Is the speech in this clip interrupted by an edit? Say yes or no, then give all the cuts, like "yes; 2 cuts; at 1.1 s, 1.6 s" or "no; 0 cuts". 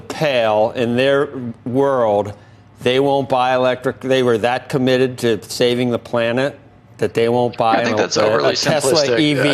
no; 0 cuts